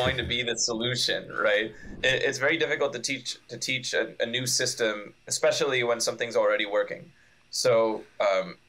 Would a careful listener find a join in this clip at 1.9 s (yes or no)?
yes